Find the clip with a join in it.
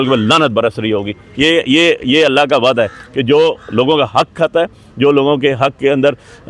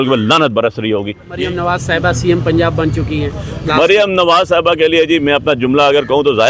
second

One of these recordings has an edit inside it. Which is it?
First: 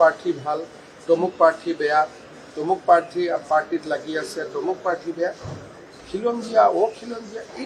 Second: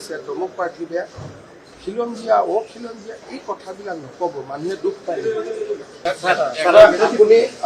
second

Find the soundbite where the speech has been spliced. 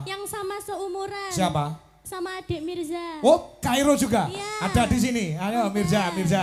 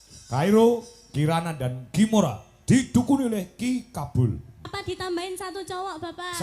second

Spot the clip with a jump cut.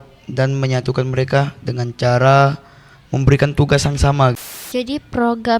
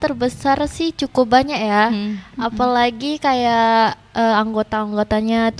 first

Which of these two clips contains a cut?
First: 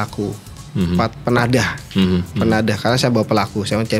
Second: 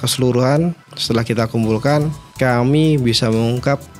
second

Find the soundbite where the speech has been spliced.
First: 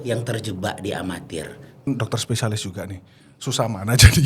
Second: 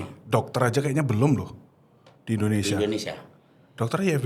first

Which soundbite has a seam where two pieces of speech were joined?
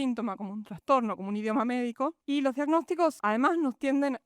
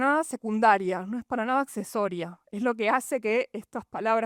first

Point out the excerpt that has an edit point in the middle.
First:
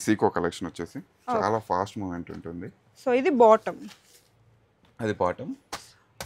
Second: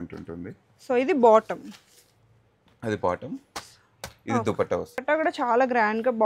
second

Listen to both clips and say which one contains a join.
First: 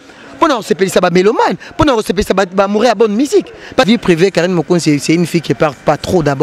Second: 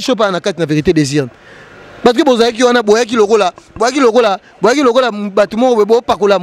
first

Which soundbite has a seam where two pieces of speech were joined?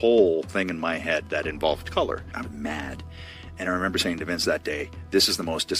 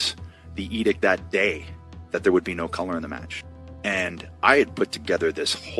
first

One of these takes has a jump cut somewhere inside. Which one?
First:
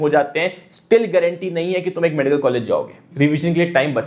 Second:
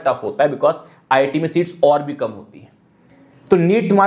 first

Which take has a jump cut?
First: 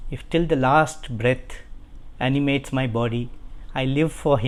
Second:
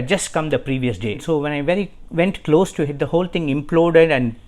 second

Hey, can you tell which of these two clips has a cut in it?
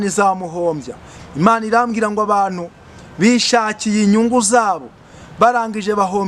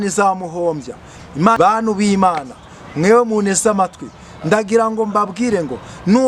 second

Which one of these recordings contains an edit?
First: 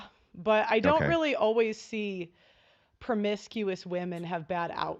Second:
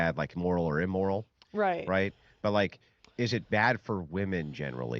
second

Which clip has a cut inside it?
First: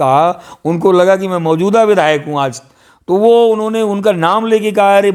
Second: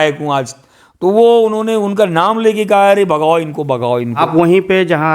second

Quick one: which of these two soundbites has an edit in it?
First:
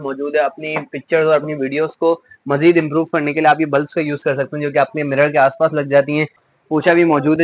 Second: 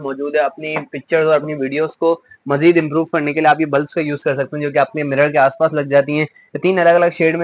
first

